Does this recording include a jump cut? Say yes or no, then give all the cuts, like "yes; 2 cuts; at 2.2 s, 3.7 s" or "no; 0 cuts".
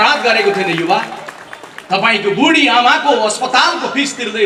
no; 0 cuts